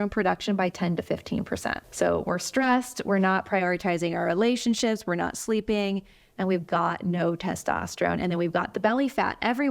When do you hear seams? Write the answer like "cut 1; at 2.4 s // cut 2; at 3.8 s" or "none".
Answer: cut 1; at 1.8 s